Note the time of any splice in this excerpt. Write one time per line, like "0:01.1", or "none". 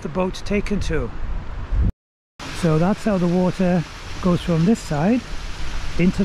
0:01.9

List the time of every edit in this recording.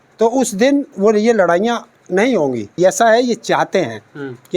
0:02.7

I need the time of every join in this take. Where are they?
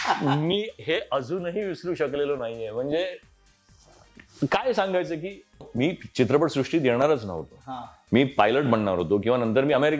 0:05.7

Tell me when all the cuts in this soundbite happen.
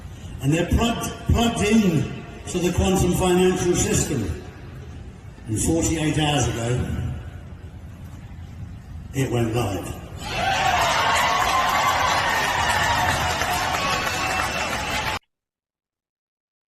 0:15.2

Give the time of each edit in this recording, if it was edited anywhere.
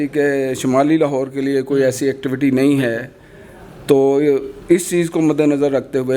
none

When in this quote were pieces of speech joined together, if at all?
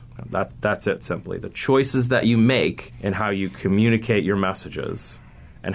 0:02.9

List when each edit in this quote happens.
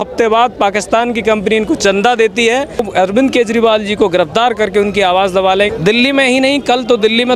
0:02.9
0:05.7

